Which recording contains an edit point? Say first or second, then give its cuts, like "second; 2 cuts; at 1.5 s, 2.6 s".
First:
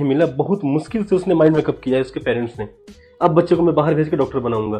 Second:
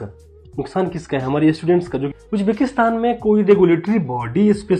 second; 1 cut; at 2.1 s